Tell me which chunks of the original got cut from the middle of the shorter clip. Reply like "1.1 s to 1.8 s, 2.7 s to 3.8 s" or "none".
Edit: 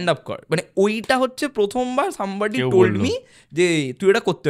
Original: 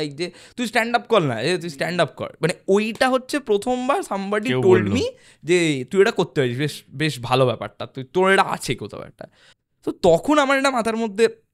none